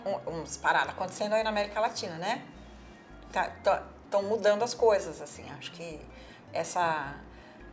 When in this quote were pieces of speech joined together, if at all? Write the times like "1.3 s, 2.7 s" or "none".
none